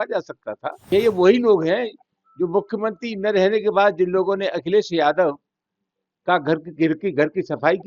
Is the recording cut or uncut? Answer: cut